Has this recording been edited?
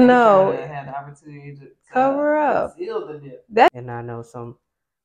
yes; 1 cut; at 3.7 s

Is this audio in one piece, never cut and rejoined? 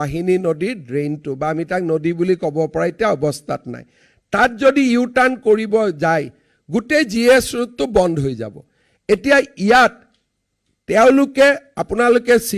yes; 0 cuts

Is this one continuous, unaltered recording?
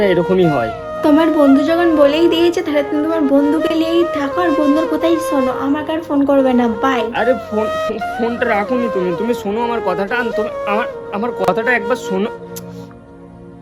yes; 0 cuts

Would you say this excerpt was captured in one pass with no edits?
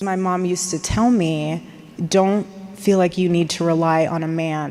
yes; 0 cuts

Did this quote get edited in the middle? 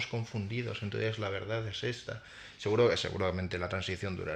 no; 0 cuts

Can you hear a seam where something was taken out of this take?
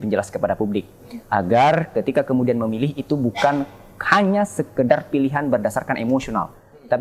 no; 0 cuts

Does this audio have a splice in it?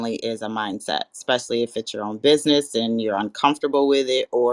no; 0 cuts

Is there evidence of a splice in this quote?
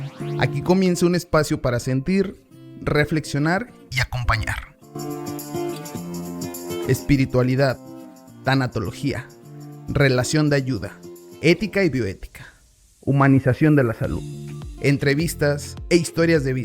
yes; 1 cut; at 13.8 s

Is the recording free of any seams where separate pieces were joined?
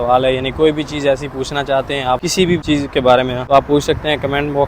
no; 2 cuts; at 2.5 s, 3.4 s

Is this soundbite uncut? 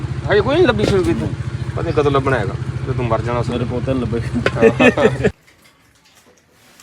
no; 1 cut; at 5.4 s

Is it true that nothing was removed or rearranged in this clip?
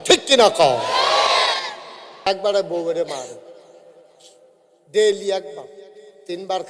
no; 1 cut; at 2.3 s

